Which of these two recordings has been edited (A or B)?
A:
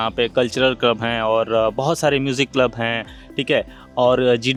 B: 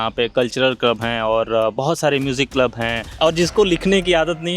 B